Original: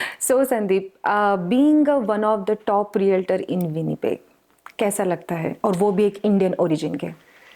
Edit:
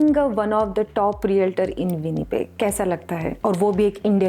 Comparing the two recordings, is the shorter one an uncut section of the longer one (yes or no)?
no